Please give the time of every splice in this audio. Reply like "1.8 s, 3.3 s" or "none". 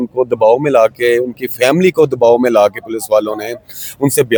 none